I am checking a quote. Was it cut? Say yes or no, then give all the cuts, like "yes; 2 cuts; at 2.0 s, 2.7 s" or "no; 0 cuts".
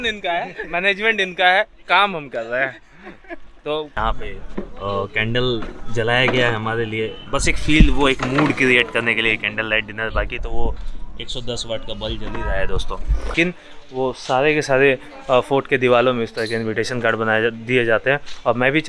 yes; 2 cuts; at 3.9 s, 13.3 s